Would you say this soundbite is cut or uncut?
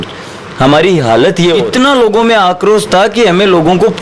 cut